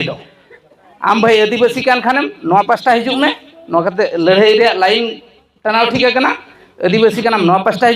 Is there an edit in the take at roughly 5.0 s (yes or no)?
no